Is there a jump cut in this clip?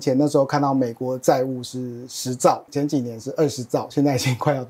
no; 0 cuts

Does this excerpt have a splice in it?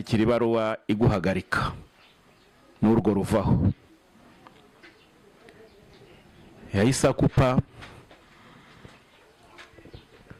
no; 0 cuts

